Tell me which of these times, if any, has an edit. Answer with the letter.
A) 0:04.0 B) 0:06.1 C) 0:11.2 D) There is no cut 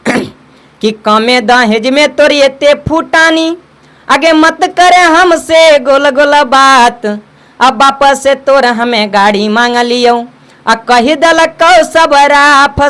D